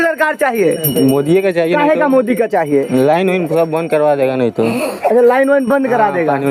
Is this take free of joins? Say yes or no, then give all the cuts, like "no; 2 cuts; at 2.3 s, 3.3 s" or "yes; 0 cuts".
yes; 0 cuts